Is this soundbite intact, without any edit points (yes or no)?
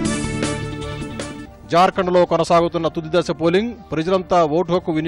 no